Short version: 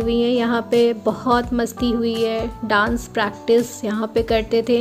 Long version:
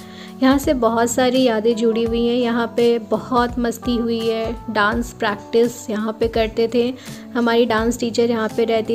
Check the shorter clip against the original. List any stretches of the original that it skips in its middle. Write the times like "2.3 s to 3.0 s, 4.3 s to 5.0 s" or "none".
none

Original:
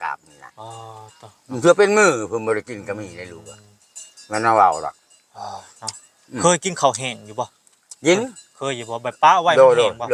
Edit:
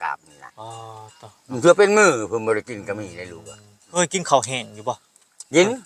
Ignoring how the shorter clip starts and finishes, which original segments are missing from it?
4.0 s to 6.5 s

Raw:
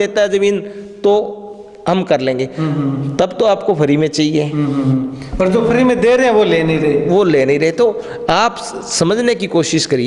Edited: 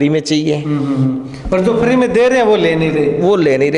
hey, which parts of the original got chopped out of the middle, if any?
none

